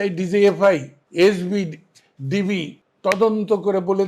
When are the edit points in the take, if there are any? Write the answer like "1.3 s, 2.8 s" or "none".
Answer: 1.0 s, 2.8 s